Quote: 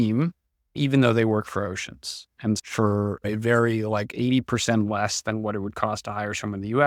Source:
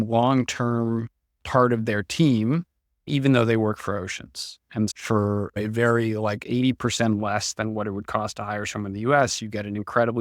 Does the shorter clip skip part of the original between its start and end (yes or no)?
no